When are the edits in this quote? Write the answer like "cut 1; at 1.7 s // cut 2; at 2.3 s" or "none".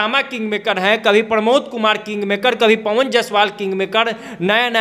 none